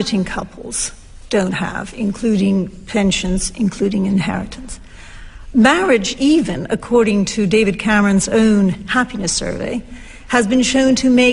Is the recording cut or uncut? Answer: uncut